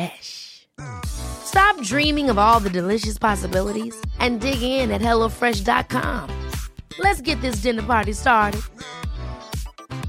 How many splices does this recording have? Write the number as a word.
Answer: zero